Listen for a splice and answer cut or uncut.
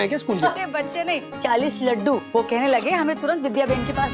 cut